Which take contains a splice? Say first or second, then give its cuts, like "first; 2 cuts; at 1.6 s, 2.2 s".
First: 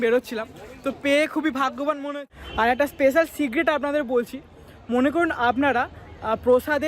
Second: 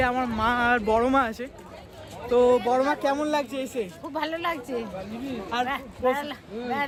first; 1 cut; at 2.1 s